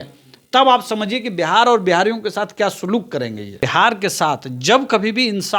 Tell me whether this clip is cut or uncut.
cut